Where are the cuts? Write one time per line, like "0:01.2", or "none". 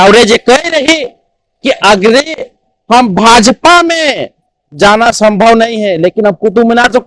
none